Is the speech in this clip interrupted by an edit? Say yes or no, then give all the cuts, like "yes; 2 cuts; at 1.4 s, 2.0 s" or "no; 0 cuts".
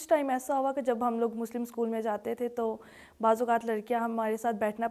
no; 0 cuts